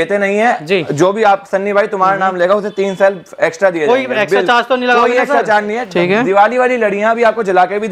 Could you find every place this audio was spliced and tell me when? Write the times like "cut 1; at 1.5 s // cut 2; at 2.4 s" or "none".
cut 1; at 5.8 s